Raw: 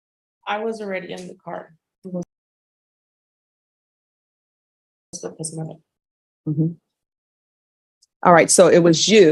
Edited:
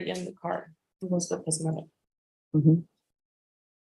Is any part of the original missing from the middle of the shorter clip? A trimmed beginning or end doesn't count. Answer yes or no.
yes